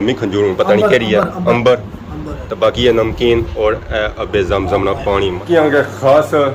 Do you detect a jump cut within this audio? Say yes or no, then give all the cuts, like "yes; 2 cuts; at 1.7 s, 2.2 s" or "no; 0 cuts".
yes; 1 cut; at 5.4 s